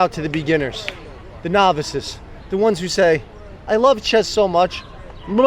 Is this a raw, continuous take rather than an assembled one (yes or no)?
yes